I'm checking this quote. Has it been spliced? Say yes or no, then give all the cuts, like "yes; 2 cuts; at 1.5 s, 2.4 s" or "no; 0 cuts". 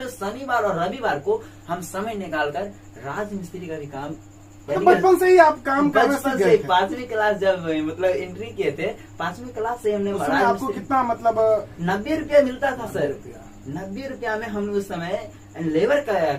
no; 0 cuts